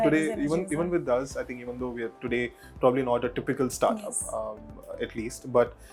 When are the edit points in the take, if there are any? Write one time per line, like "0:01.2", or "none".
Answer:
none